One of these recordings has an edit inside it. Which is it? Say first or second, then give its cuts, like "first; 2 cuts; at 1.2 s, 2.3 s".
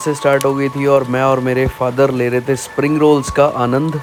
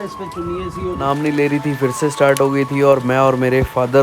second; 1 cut; at 1.0 s